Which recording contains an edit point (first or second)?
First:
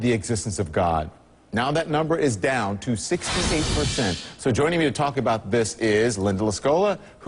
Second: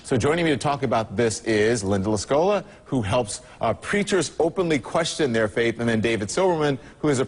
second